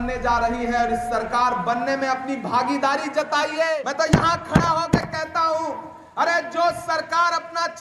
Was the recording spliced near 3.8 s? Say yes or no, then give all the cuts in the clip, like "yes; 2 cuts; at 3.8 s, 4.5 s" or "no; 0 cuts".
yes; 1 cut; at 3.8 s